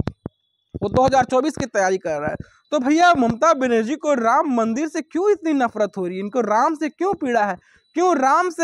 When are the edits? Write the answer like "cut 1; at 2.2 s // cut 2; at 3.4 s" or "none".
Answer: none